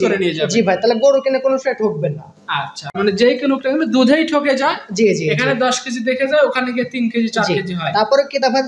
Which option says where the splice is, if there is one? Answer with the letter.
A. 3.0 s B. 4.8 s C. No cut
A